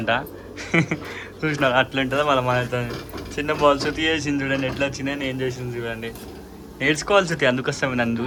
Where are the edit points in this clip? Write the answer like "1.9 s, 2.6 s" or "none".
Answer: none